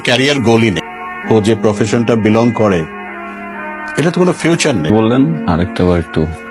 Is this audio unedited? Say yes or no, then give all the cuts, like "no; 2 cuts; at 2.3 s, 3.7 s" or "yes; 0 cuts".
no; 2 cuts; at 0.9 s, 4.9 s